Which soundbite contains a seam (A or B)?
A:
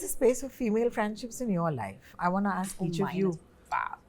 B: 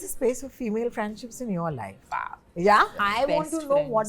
B